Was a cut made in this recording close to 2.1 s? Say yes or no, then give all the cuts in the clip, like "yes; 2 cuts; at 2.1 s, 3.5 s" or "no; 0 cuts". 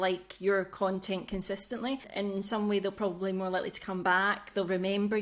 yes; 1 cut; at 2.1 s